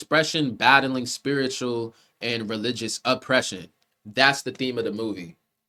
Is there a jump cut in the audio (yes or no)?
no